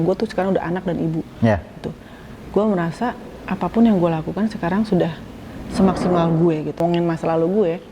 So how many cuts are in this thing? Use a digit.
1